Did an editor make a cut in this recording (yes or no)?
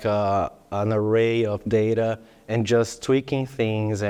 no